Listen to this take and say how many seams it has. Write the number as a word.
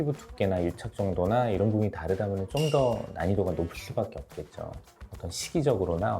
one